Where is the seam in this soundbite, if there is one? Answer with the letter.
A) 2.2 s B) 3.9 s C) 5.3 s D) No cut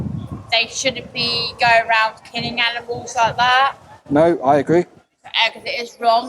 D